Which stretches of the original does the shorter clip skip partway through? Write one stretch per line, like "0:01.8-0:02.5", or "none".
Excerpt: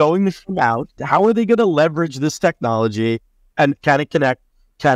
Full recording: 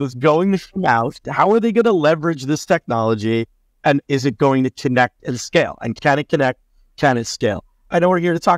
0:04.1-0:06.0